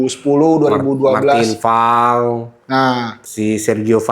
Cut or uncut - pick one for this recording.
cut